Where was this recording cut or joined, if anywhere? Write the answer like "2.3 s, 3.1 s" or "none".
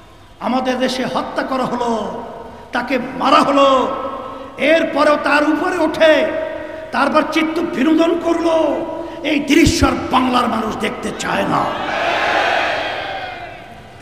none